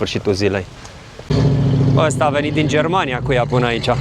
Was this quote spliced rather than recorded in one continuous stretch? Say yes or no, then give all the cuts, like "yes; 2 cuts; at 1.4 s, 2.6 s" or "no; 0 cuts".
yes; 1 cut; at 1.3 s